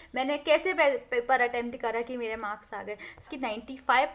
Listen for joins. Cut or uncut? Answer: cut